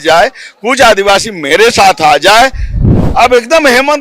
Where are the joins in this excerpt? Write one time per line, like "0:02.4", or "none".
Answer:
0:02.9